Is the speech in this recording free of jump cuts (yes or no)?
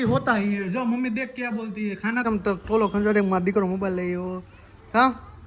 no